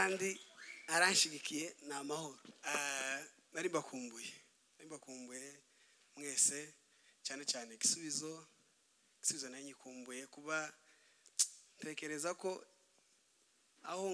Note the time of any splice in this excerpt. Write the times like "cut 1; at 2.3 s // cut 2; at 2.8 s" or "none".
cut 1; at 2.5 s